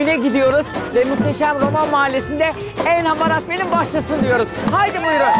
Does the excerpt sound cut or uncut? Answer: uncut